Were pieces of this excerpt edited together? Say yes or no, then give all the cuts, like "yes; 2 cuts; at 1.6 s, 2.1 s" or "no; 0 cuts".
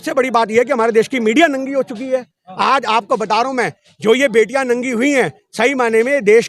no; 0 cuts